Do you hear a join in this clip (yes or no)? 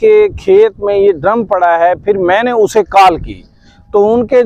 no